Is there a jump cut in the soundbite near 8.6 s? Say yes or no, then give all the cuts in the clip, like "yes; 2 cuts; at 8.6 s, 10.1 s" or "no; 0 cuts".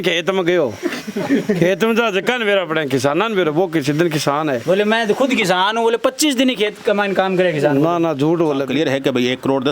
yes; 1 cut; at 8.6 s